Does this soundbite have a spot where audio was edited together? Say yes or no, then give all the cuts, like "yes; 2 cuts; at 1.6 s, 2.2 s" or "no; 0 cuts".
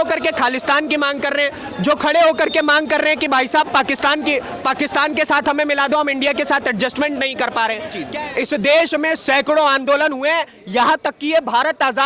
yes; 1 cut; at 8.0 s